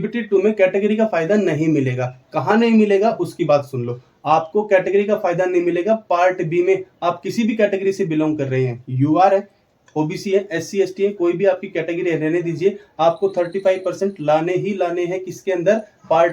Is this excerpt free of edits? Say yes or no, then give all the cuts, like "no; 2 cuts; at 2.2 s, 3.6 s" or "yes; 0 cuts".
yes; 0 cuts